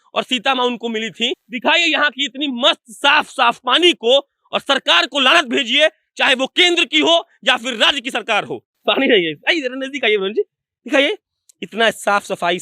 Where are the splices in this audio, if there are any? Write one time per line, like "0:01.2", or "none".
0:01.4
0:08.7